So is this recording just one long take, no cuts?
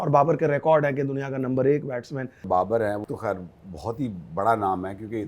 no; 2 cuts; at 2.4 s, 3.0 s

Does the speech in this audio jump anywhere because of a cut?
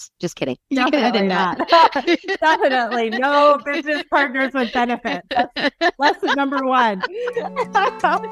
no; 0 cuts

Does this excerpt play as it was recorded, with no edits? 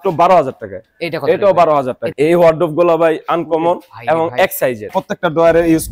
no; 2 cuts; at 2.1 s, 5.0 s

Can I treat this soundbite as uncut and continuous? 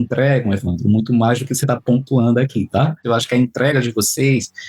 no; 1 cut; at 3.0 s

